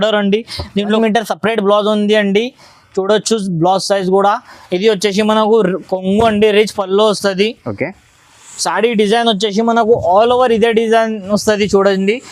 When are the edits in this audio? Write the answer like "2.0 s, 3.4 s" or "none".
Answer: 1.0 s